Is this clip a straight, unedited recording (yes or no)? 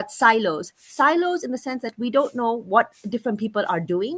yes